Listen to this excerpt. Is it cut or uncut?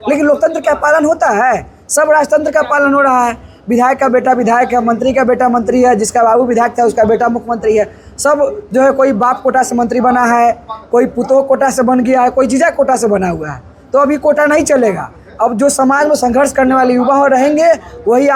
uncut